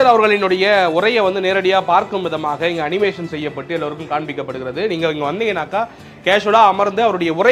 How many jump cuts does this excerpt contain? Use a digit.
0